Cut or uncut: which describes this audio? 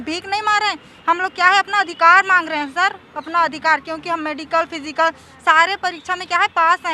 uncut